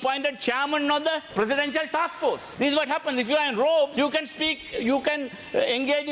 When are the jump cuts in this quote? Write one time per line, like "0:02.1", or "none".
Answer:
0:01.2
0:02.5
0:03.9